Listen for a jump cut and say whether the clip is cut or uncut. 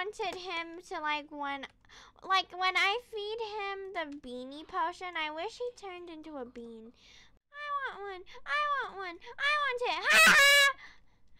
cut